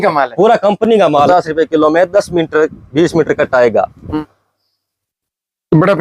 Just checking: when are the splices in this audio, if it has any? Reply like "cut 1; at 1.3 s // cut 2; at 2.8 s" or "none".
cut 1; at 1.3 s // cut 2; at 4.0 s